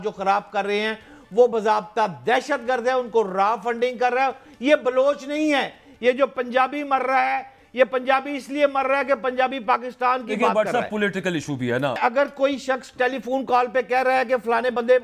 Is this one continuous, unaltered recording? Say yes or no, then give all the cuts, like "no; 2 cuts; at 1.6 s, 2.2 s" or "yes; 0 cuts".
no; 1 cut; at 12.0 s